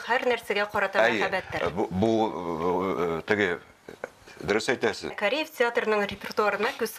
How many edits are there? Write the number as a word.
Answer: one